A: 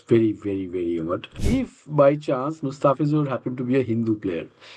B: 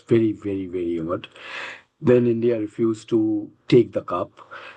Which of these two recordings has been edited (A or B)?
A